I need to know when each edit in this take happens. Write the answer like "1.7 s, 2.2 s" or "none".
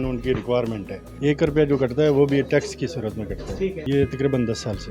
1.2 s, 3.8 s